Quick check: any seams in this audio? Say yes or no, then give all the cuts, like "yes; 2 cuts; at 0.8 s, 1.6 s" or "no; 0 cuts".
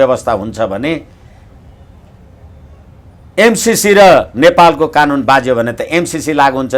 no; 0 cuts